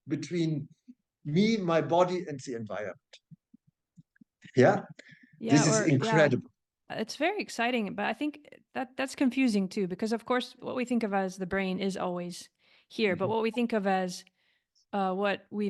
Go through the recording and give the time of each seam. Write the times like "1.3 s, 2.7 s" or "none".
none